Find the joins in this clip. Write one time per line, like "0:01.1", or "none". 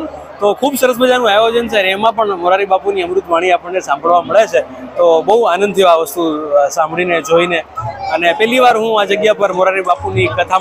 none